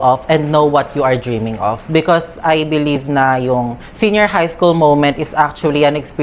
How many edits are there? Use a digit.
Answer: 0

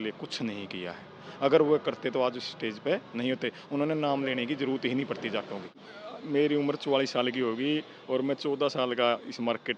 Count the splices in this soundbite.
1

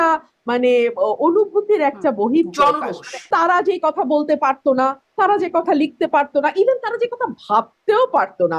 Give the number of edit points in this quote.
1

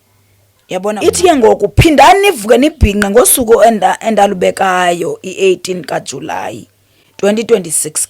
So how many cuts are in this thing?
1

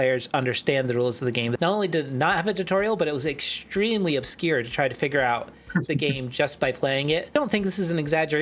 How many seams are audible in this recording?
2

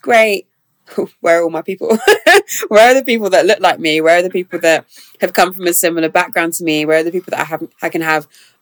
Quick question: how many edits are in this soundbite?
0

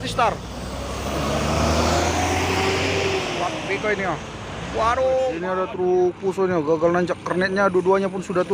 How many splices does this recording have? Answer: 1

